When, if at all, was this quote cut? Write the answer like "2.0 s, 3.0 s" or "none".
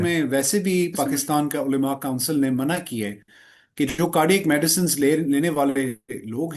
none